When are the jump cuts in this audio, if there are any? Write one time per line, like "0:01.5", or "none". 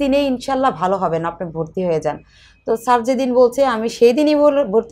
none